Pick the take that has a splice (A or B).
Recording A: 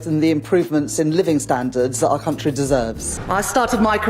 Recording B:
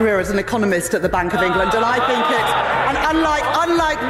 A